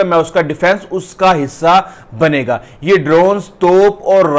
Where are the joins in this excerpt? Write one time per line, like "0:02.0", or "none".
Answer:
none